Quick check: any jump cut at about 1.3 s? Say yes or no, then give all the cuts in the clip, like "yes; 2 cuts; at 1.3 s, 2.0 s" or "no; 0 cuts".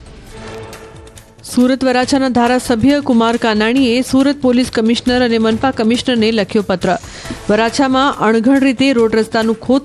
yes; 1 cut; at 1.3 s